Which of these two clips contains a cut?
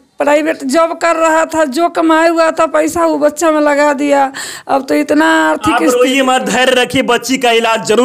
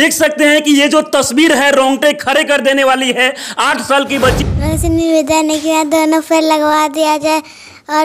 second; 1 cut; at 4.4 s

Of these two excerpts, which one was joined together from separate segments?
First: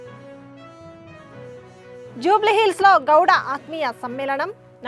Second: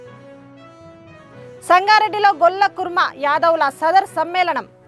second; 1 cut; at 1.4 s

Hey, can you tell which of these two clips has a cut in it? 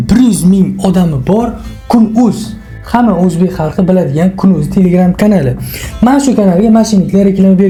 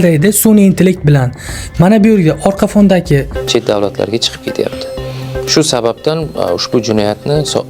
second; 1 cut; at 3.3 s

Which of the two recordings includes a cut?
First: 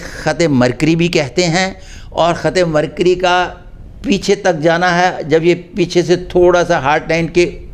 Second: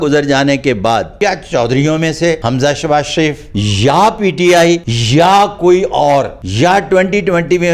second; 5 cuts; at 1.1 s, 2.4 s, 3.5 s, 4.9 s, 6.4 s

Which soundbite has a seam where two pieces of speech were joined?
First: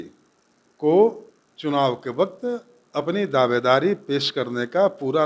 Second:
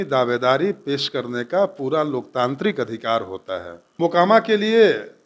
second; 1 cut; at 3.9 s

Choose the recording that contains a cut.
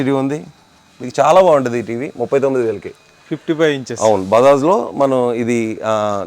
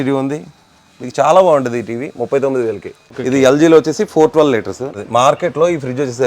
second; 2 cuts; at 3.0 s, 5.0 s

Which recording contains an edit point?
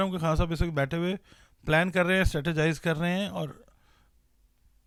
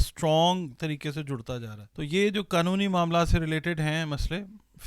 second; 1 cut; at 1.8 s

